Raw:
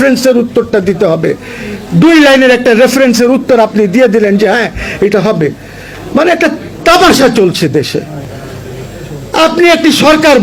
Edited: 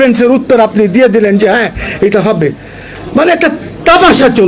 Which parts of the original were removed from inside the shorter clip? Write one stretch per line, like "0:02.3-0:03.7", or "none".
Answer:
none